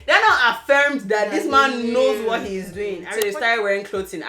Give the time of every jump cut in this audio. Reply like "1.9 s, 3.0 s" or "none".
3.1 s